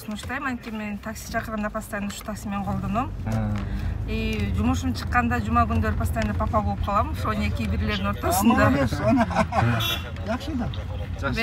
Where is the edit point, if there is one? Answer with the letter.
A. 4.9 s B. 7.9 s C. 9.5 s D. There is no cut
D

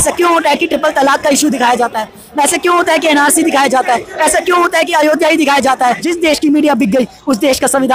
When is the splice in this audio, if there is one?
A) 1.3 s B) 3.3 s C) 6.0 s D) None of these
C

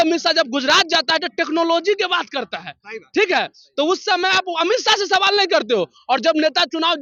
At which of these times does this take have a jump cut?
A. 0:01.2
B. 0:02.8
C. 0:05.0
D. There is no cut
D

